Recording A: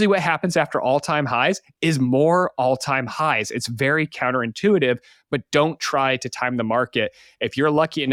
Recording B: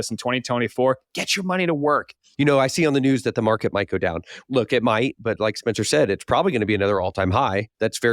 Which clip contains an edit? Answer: B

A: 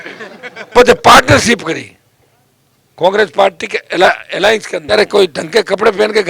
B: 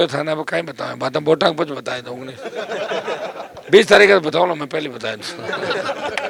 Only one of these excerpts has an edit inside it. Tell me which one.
A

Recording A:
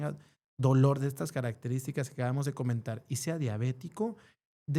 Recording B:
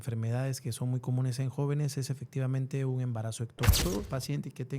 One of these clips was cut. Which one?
B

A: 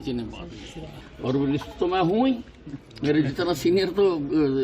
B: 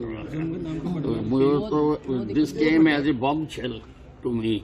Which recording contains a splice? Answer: A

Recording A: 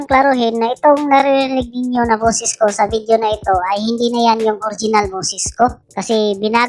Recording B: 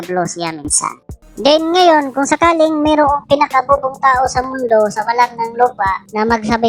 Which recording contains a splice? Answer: B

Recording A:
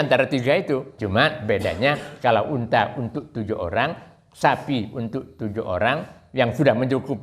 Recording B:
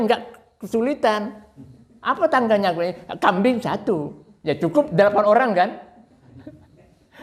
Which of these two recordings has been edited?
A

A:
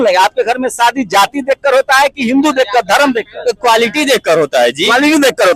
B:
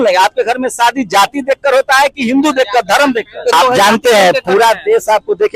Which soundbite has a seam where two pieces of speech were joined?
B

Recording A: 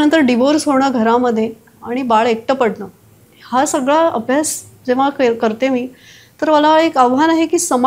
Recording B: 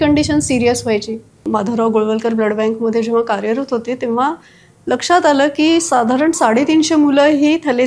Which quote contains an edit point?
B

